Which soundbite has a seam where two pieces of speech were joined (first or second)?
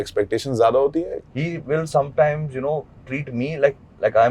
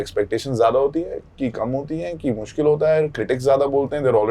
first